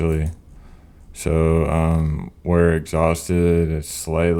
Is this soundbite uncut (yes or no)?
yes